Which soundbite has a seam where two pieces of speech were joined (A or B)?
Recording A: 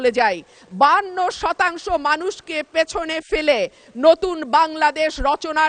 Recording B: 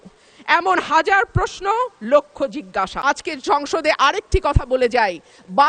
B